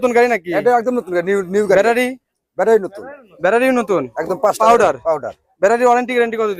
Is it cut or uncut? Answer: uncut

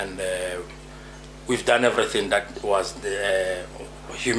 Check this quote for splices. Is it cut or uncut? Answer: uncut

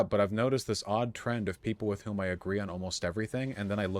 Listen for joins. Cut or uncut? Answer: uncut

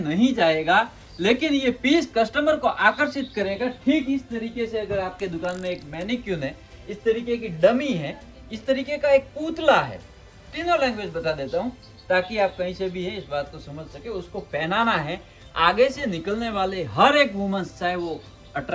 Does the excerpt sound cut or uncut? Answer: uncut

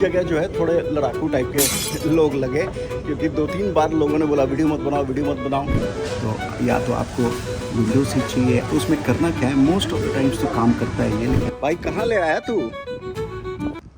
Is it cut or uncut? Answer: cut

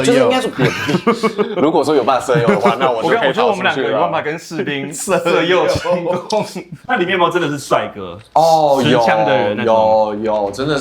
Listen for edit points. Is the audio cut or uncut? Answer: cut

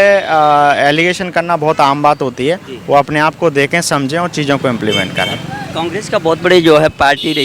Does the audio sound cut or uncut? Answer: uncut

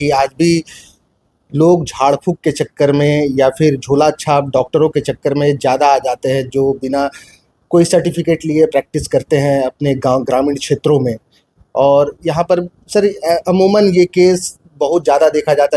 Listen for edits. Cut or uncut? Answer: uncut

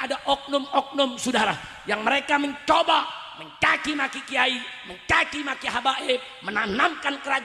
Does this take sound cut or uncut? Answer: uncut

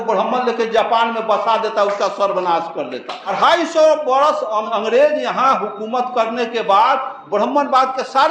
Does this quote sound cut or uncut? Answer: cut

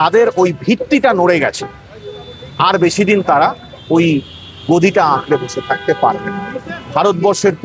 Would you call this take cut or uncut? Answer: uncut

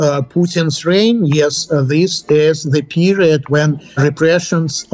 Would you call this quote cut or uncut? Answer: uncut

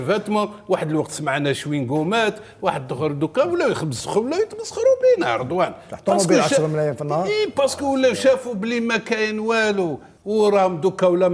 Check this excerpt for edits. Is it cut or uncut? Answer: uncut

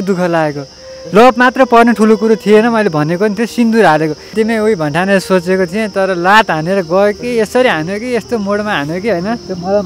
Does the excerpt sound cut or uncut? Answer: cut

